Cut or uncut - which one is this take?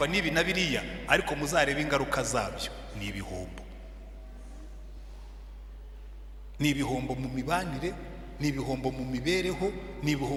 uncut